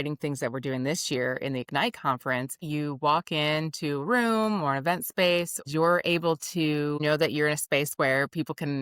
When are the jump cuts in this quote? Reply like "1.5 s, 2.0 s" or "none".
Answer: 2.7 s, 5.6 s, 7.0 s